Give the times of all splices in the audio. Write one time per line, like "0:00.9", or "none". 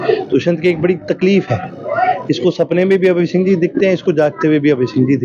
none